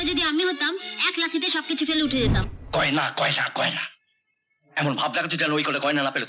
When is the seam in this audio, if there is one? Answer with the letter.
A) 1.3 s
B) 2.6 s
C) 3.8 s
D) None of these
B